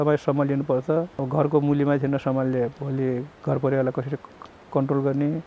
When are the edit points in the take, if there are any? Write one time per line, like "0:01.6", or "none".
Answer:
0:01.2